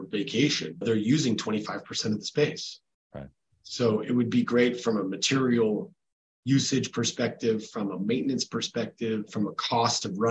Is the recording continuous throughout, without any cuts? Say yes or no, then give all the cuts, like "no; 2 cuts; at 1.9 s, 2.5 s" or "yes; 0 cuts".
yes; 0 cuts